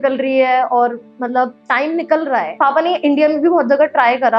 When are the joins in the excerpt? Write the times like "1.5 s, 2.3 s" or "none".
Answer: 2.5 s